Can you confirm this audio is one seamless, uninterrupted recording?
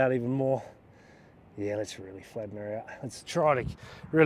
yes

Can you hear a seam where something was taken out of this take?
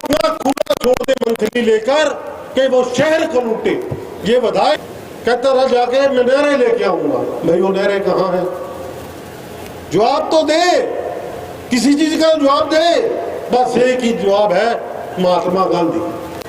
yes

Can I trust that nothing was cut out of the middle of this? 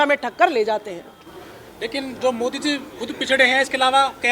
yes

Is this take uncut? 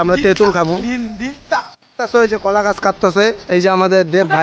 no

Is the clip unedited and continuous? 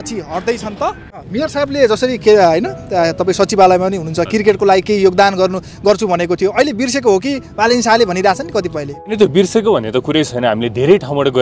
no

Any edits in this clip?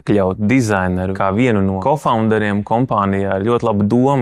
yes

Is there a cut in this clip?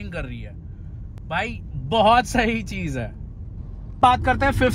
no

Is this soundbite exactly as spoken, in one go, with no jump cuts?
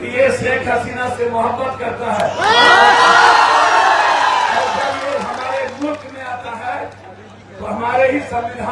yes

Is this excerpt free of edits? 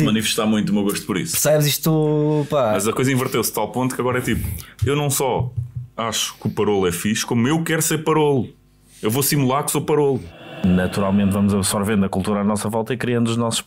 no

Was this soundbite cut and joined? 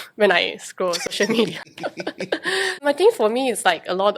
yes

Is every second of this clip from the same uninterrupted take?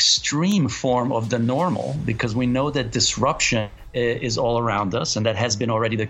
no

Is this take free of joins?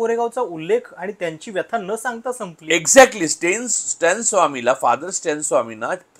yes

